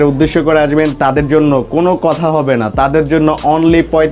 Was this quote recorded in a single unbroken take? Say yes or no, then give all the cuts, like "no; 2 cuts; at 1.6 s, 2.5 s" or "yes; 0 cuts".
yes; 0 cuts